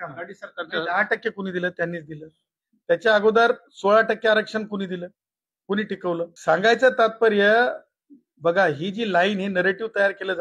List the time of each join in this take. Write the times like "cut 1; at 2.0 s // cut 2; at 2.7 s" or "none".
cut 1; at 6.3 s